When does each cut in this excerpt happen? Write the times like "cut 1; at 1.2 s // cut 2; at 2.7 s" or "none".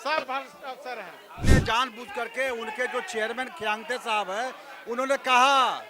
cut 1; at 1.6 s